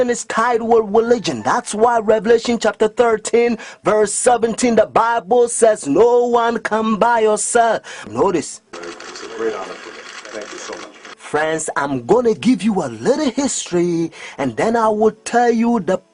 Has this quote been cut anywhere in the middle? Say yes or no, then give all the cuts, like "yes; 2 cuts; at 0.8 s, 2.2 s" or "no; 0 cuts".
no; 0 cuts